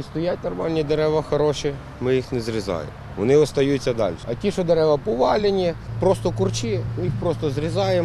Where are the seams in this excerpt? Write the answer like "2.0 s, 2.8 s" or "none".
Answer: 4.3 s, 5.8 s, 6.9 s